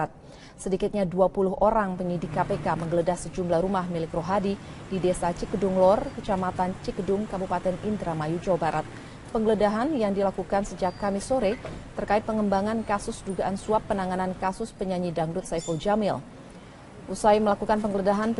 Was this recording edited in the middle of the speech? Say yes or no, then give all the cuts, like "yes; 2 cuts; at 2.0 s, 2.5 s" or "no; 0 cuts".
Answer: no; 0 cuts